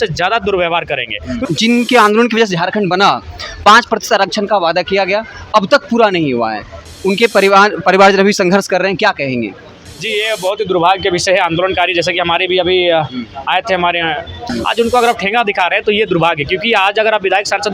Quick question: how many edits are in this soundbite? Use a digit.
2